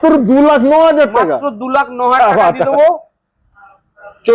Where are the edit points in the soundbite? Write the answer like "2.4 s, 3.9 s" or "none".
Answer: none